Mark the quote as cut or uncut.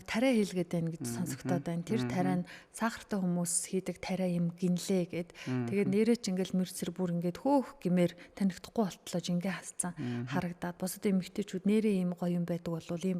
uncut